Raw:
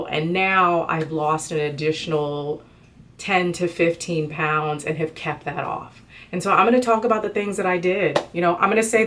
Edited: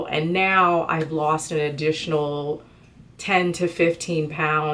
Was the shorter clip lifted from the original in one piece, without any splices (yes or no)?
yes